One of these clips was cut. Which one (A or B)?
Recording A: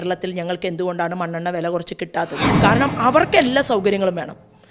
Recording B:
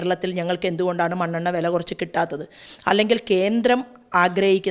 A